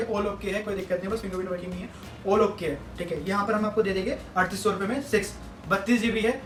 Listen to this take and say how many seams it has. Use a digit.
0